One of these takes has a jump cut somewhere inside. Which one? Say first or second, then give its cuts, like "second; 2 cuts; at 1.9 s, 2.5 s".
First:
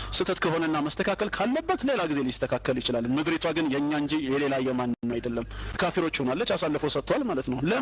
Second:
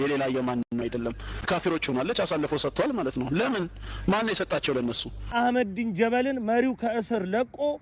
second; 1 cut; at 5.3 s